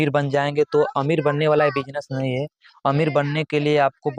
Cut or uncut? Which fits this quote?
uncut